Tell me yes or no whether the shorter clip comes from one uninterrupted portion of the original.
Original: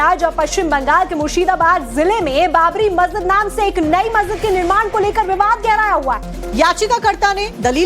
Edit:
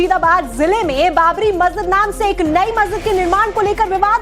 yes